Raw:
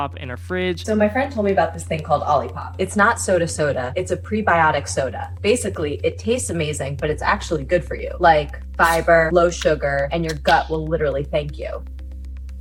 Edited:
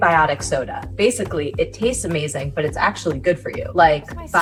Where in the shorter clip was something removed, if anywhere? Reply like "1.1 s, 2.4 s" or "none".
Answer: none